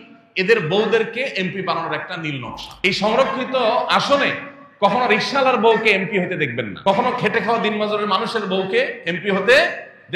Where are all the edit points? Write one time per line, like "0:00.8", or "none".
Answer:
0:06.7

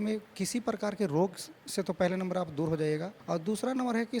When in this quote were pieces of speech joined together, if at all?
0:03.1

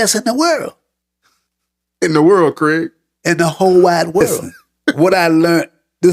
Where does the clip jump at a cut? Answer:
0:04.9

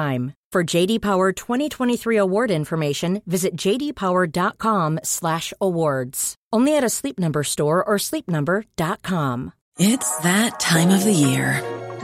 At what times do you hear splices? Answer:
0:09.6

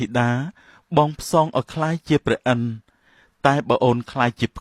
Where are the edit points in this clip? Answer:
none

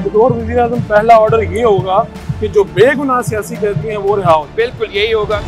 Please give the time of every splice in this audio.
none

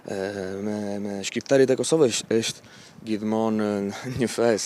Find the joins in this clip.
none

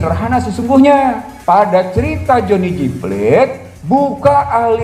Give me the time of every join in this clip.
0:01.3

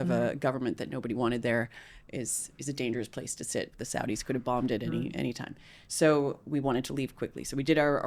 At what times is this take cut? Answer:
none

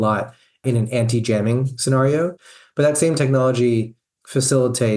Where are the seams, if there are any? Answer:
0:02.4

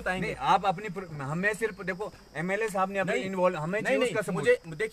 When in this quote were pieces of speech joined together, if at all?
none

